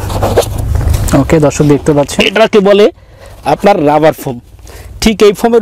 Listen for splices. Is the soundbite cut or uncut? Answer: uncut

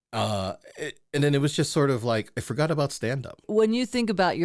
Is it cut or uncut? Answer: cut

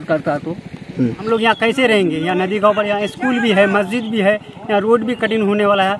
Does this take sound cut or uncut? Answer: cut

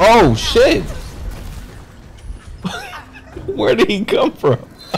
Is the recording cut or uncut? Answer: uncut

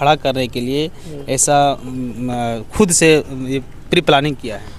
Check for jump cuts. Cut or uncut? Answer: uncut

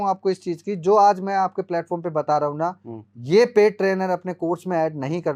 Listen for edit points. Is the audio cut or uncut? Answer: uncut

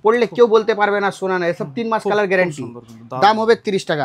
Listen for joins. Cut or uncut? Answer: uncut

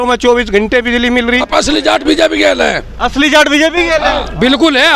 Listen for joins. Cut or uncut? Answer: cut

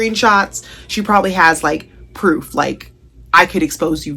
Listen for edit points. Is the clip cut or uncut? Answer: uncut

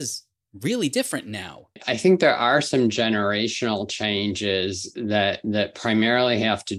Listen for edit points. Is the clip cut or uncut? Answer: cut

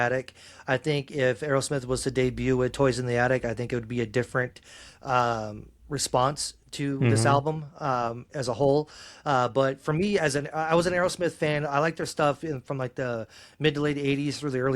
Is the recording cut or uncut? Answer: uncut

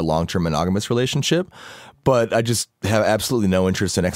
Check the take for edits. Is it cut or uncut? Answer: uncut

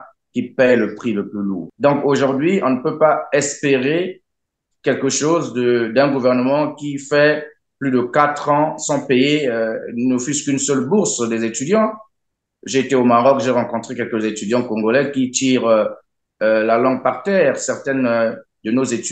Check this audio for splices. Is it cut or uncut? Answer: cut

